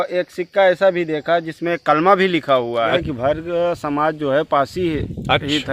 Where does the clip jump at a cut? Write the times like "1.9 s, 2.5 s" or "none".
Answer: 2.7 s